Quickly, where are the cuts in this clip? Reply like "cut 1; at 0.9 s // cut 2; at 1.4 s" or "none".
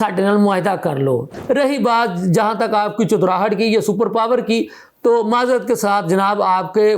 cut 1; at 1.3 s